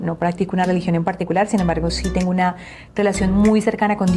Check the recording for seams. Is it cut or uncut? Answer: uncut